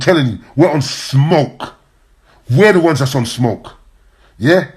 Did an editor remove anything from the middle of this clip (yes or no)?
no